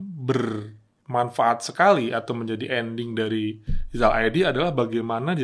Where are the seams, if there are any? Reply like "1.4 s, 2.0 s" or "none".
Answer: none